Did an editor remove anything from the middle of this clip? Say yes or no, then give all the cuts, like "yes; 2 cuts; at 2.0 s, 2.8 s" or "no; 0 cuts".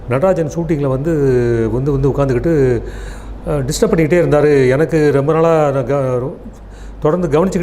no; 0 cuts